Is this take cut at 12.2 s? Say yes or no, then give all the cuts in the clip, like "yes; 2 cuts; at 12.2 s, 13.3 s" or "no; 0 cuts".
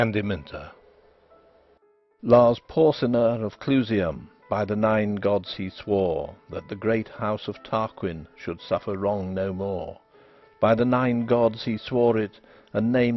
yes; 1 cut; at 12.2 s